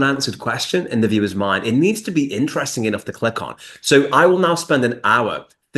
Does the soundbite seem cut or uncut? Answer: uncut